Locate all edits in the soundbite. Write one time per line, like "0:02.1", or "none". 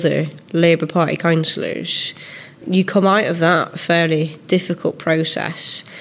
0:02.6